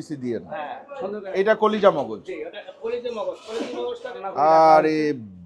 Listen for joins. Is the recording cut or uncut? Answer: cut